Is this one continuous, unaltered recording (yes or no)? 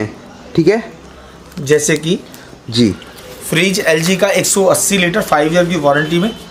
yes